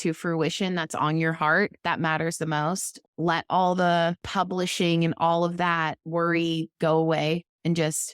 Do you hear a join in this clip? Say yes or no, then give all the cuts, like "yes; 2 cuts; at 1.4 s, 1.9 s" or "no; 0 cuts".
yes; 2 cuts; at 3.0 s, 4.2 s